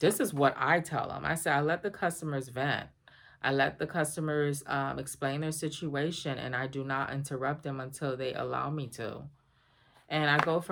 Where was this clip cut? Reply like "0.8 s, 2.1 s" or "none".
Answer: none